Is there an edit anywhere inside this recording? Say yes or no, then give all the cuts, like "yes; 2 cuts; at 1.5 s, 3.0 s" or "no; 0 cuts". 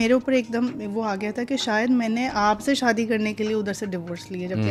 no; 0 cuts